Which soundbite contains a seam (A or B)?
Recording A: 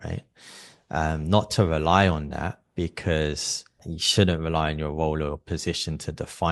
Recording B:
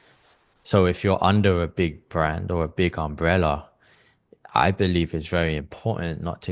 A